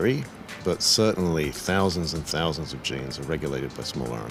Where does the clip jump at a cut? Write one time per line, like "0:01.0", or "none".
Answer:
none